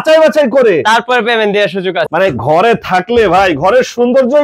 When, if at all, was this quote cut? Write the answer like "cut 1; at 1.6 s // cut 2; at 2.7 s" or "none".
cut 1; at 2.1 s